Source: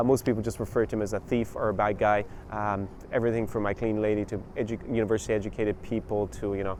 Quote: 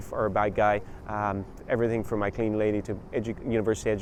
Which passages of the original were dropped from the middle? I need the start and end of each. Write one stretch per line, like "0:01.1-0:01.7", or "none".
none